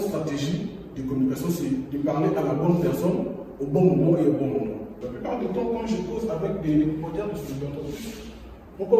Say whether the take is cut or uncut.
cut